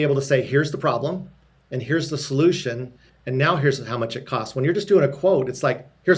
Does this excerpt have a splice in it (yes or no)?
no